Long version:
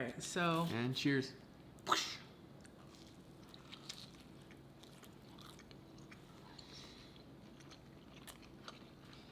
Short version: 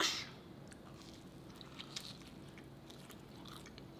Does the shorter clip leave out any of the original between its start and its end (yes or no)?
no